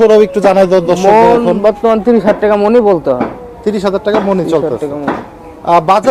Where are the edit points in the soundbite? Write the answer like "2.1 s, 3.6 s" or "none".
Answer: none